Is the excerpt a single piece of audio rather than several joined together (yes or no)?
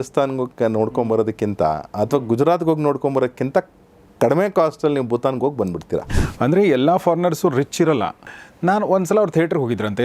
no